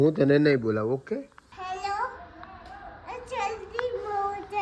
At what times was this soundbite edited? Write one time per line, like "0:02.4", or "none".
0:01.4